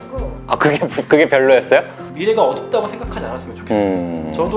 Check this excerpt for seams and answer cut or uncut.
cut